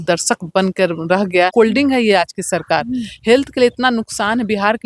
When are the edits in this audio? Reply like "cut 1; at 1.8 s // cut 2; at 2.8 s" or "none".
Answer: cut 1; at 1.5 s